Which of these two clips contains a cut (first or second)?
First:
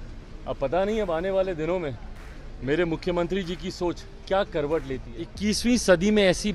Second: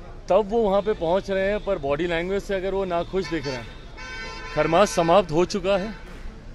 first